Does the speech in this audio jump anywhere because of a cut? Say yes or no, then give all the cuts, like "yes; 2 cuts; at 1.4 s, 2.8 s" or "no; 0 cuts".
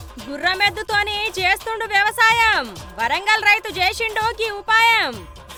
no; 0 cuts